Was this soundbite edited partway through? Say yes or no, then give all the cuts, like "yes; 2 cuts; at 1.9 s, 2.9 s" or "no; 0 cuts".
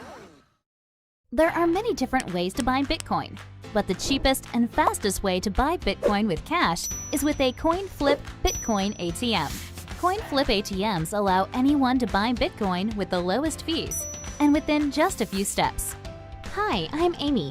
no; 0 cuts